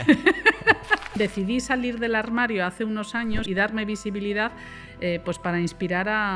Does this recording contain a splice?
yes; 2 cuts; at 1.0 s, 3.4 s

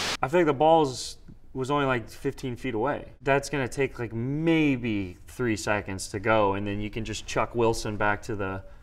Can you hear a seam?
no; 0 cuts

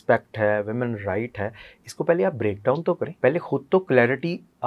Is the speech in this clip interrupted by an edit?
yes; 1 cut; at 3.1 s

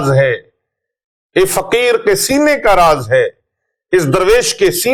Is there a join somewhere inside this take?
no; 0 cuts

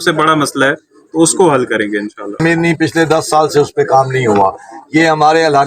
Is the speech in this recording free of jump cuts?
no; 1 cut; at 2.4 s

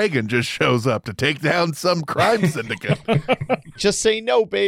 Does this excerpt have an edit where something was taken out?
yes; 1 cut; at 3.8 s

